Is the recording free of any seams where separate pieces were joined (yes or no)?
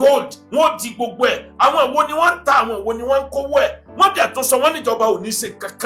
yes